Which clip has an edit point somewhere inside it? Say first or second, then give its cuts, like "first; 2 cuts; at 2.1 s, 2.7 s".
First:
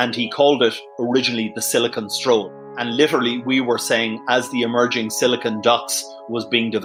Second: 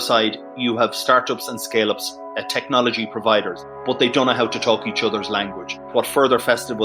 second; 2 cuts; at 3.6 s, 5.9 s